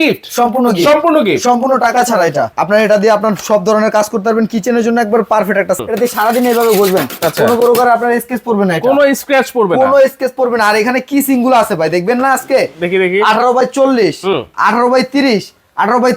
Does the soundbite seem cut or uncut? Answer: cut